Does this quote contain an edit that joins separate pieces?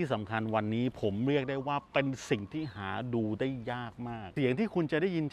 yes; 1 cut; at 4.3 s

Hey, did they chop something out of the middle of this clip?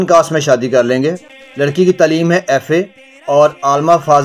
yes; 1 cut; at 1.7 s

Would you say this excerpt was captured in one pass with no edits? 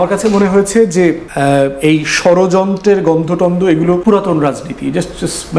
no; 2 cuts; at 1.3 s, 4.0 s

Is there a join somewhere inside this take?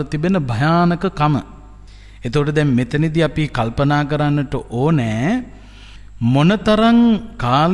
no; 0 cuts

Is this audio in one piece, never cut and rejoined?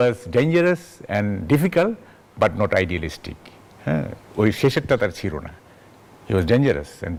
yes; 0 cuts

